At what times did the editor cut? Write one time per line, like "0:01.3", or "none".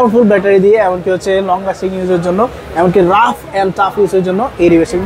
none